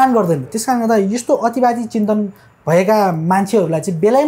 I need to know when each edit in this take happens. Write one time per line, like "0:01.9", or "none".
none

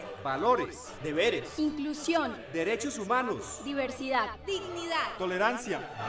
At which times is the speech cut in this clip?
0:03.6

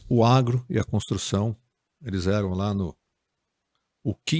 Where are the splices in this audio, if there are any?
none

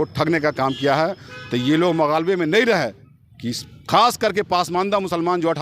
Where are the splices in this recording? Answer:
none

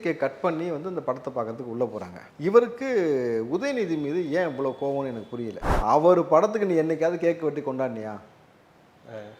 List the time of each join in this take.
0:05.6

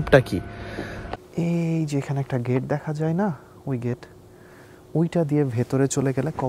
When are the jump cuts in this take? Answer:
0:01.0

